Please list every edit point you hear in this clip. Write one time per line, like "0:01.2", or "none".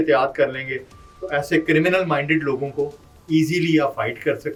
none